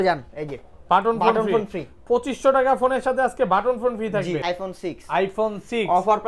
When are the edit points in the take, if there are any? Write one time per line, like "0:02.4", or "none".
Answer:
0:04.4